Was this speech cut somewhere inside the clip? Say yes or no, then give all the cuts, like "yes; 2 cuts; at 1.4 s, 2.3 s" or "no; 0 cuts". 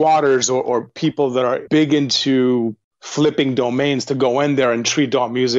yes; 1 cut; at 1.6 s